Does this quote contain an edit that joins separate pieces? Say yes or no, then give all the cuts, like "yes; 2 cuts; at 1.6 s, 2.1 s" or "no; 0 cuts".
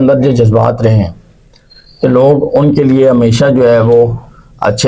no; 0 cuts